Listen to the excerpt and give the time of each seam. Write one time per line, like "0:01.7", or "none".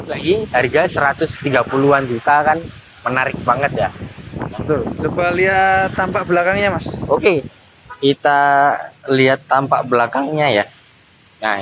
none